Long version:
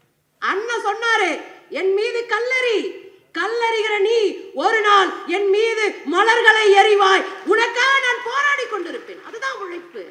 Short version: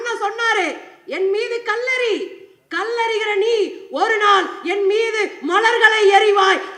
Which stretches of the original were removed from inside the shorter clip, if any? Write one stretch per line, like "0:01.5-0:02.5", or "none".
none